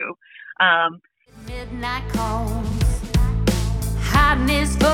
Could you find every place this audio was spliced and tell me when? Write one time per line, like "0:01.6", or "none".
0:01.4